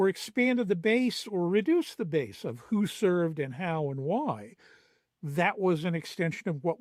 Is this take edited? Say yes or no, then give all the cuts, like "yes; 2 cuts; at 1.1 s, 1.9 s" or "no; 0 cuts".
no; 0 cuts